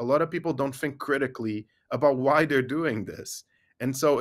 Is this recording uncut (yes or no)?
yes